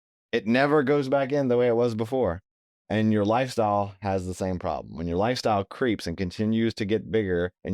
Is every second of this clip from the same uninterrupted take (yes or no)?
yes